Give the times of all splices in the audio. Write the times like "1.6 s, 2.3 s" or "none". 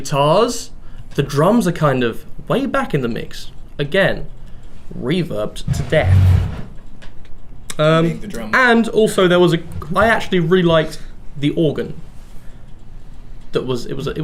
none